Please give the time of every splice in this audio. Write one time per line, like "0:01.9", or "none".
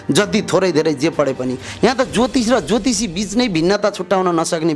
none